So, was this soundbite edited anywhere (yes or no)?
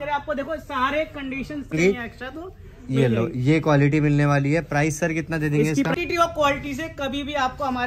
yes